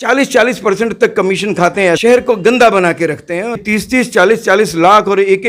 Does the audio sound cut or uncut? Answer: cut